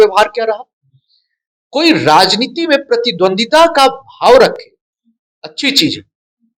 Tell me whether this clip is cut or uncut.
uncut